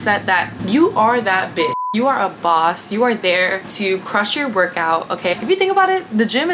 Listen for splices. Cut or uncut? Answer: cut